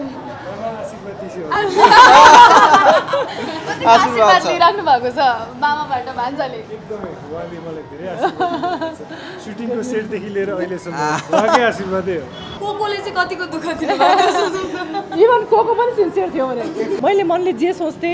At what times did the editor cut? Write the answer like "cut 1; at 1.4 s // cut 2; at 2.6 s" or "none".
cut 1; at 12.5 s // cut 2; at 16.9 s